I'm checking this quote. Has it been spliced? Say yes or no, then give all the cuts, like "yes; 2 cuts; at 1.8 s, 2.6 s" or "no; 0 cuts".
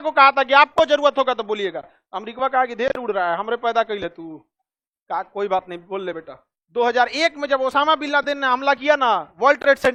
no; 0 cuts